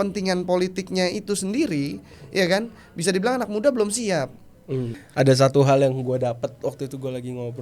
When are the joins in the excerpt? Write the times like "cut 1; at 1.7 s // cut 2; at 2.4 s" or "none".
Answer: cut 1; at 5.0 s